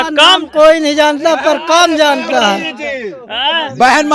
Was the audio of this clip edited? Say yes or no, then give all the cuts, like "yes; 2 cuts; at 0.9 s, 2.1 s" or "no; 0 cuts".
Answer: no; 0 cuts